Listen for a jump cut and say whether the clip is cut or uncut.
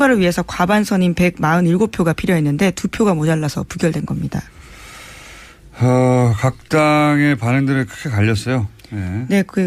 uncut